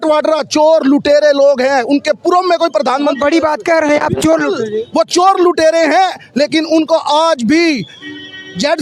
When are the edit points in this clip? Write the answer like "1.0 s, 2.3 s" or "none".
none